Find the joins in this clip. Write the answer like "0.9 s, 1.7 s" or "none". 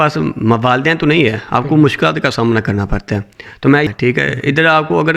3.9 s